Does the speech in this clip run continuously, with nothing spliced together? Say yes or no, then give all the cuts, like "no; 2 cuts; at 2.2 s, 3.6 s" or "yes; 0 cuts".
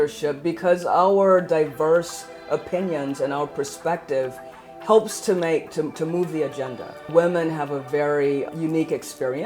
no; 2 cuts; at 7.1 s, 8.5 s